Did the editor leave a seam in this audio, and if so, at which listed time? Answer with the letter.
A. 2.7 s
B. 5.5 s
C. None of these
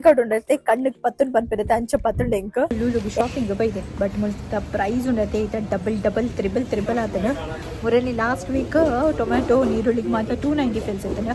A